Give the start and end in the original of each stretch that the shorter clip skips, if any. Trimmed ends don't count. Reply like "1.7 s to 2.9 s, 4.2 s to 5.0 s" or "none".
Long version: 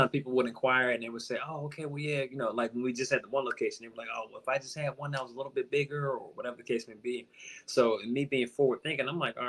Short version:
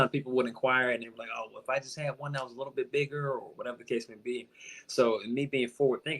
1.1 s to 3.9 s